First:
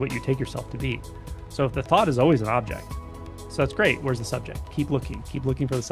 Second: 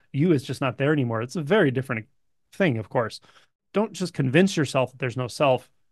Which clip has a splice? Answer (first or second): second